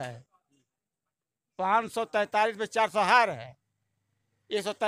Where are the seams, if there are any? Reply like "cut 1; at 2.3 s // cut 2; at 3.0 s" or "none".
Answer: none